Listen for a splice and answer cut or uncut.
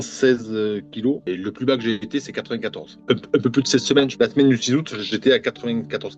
uncut